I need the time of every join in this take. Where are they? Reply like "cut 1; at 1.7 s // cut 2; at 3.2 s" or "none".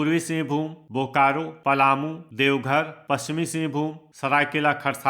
cut 1; at 1.5 s // cut 2; at 2.2 s // cut 3; at 4.0 s